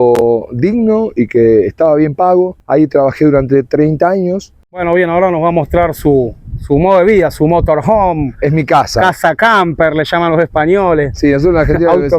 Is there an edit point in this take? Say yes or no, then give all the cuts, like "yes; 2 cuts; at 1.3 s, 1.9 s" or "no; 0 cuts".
yes; 2 cuts; at 2.6 s, 4.8 s